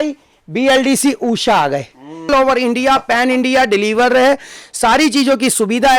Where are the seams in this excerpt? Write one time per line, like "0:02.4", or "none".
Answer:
0:02.3

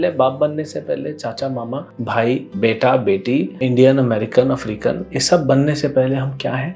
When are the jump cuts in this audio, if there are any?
0:02.3
0:03.5

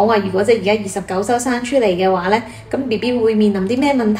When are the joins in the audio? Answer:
none

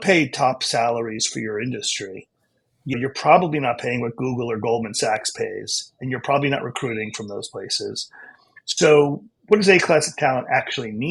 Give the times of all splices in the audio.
none

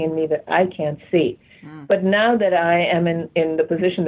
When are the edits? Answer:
none

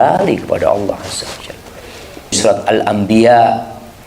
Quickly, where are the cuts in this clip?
0:02.4

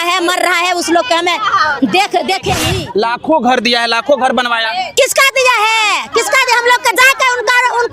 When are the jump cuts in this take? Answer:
0:02.7

